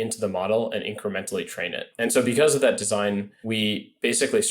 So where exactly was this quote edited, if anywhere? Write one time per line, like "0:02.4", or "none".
0:01.8
0:03.3

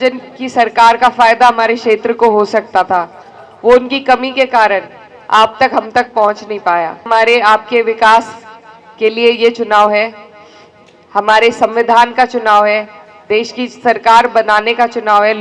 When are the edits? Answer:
0:07.1

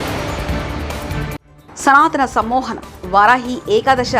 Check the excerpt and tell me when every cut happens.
0:01.5

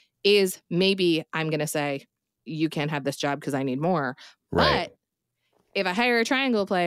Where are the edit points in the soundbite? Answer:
0:02.3

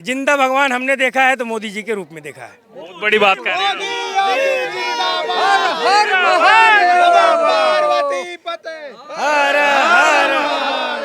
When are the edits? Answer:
none

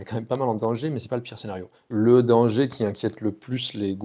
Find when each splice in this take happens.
0:01.8

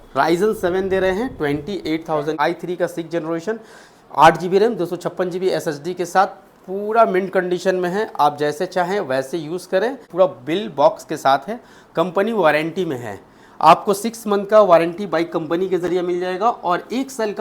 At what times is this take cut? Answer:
0:02.4
0:10.0

